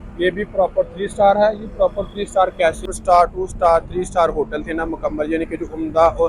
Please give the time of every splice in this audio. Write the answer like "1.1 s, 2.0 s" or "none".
2.9 s

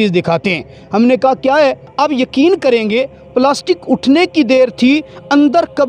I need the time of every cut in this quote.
1.8 s

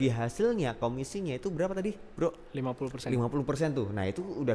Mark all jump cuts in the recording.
none

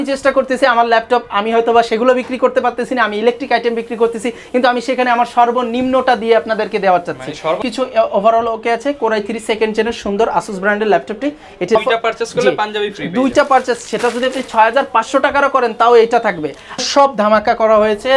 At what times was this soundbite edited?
7.6 s, 11.8 s, 16.8 s

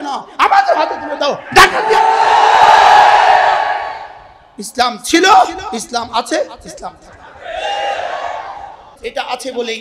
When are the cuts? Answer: 8.9 s

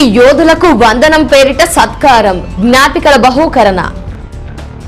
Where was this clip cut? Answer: 4.0 s

